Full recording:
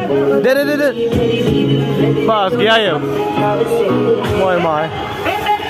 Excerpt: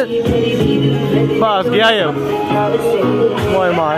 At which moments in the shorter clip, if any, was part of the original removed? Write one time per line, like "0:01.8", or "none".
none